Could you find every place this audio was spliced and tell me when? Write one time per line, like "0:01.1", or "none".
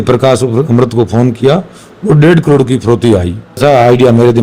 0:03.4